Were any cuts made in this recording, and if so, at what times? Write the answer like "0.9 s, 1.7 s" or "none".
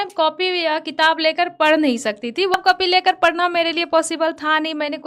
2.5 s